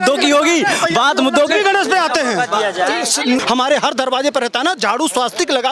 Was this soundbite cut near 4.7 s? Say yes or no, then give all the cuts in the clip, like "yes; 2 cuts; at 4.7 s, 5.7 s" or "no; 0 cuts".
no; 1 cut; at 3.4 s